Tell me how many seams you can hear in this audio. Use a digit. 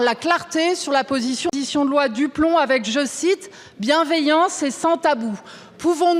1